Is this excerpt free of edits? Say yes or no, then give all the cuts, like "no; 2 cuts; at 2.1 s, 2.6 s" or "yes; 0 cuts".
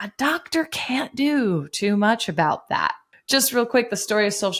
yes; 0 cuts